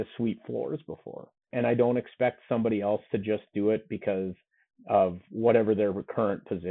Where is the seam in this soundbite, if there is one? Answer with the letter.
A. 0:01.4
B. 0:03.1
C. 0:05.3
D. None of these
A